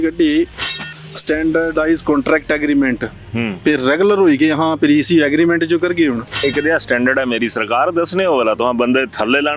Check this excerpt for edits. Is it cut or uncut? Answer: cut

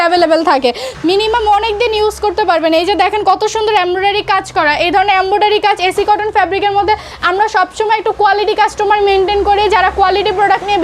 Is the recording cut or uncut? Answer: cut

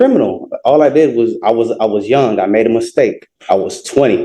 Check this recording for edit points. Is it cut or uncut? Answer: cut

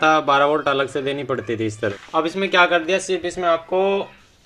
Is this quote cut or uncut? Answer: cut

